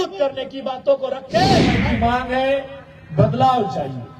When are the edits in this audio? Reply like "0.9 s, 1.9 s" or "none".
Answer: 1.8 s

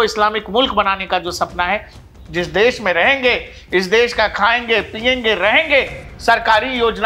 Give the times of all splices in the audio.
2.0 s

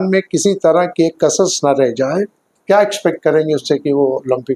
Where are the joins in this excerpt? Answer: 2.5 s

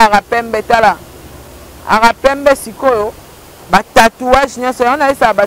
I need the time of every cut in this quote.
none

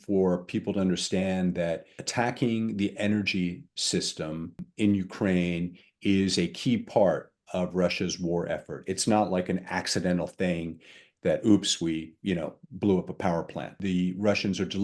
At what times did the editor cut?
2.0 s, 4.7 s, 13.8 s

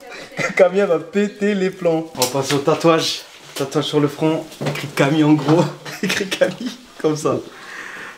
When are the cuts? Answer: none

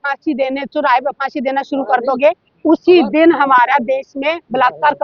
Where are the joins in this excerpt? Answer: none

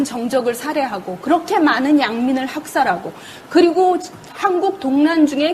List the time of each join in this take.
1.2 s

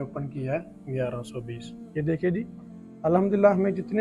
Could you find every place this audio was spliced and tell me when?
none

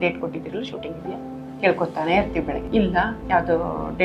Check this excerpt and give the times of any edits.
2.6 s

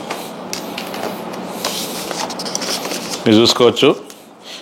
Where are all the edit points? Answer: none

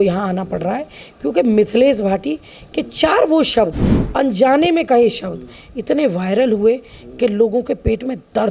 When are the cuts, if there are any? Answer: none

